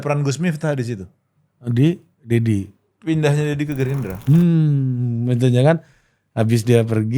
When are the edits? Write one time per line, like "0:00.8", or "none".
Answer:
0:04.1